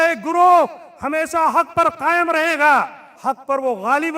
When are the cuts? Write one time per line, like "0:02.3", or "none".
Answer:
0:03.1